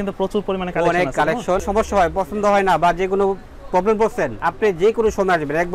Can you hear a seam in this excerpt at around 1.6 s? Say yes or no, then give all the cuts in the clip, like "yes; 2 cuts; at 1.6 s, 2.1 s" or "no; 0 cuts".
yes; 2 cuts; at 1.6 s, 4.4 s